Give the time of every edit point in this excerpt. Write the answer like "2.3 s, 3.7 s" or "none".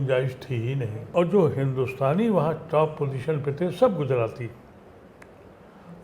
1.0 s